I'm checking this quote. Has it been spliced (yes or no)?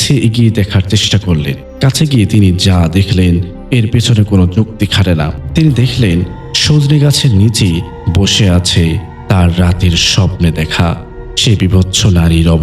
yes